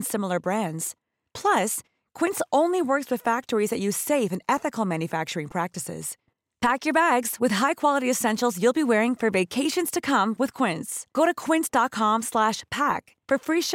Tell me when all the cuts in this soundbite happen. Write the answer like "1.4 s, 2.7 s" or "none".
none